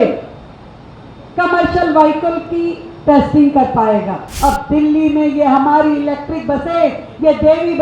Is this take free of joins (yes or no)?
no